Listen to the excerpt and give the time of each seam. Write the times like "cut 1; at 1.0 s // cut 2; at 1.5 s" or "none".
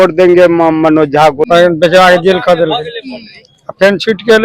cut 1; at 1.4 s